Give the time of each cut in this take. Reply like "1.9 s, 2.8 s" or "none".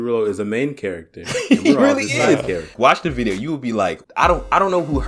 2.7 s, 4.0 s